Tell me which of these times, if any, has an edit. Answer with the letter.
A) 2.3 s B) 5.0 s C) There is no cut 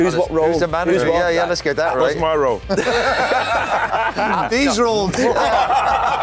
C